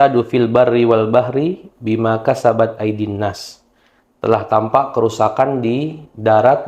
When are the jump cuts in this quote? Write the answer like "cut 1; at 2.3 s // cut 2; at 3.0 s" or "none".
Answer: none